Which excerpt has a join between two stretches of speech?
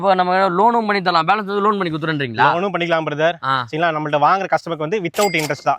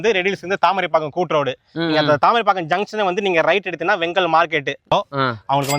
second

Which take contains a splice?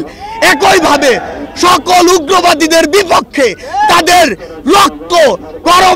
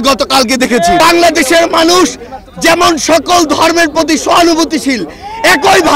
second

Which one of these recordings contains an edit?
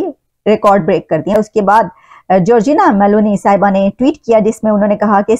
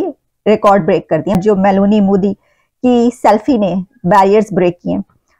first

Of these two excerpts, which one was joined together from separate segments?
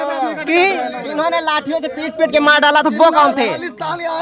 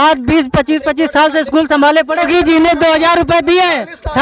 second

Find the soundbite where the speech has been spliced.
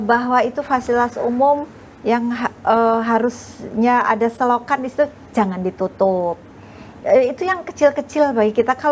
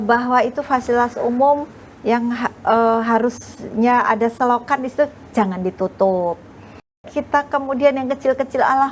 second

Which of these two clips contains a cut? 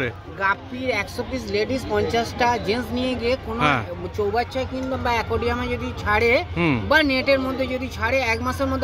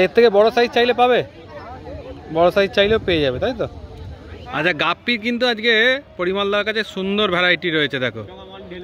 second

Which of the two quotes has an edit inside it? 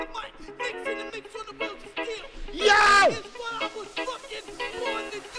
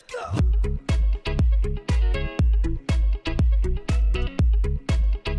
second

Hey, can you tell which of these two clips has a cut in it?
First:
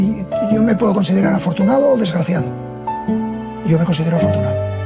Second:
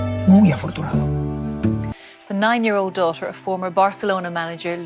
second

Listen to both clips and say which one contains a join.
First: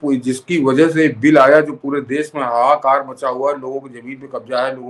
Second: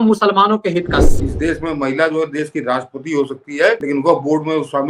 second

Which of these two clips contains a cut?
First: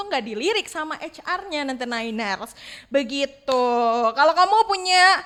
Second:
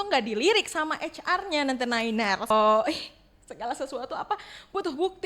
second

